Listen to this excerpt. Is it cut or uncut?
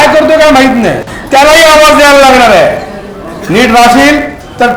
cut